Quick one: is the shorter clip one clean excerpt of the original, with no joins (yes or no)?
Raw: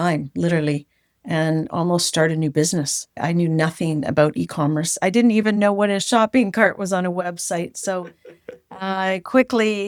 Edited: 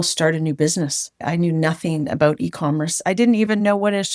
yes